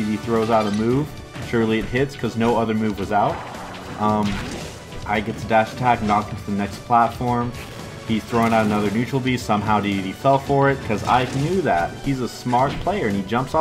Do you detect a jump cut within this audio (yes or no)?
yes